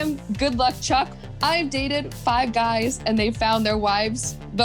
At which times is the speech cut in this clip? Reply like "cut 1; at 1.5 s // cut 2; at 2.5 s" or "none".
cut 1; at 1.1 s